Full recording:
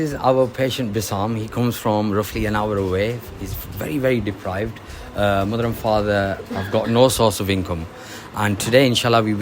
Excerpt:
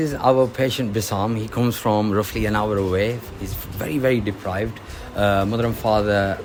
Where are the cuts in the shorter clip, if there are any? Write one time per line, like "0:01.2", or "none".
none